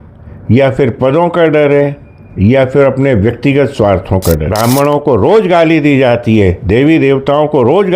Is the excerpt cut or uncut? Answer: cut